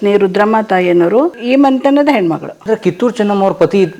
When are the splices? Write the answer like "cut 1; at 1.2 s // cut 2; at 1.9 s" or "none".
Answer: cut 1; at 1.4 s // cut 2; at 2.5 s